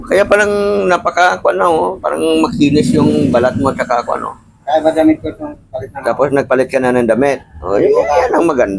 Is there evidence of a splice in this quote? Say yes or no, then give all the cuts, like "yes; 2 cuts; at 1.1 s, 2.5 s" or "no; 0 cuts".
no; 0 cuts